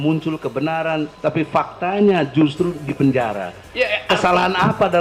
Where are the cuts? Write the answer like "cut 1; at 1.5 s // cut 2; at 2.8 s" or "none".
cut 1; at 1.1 s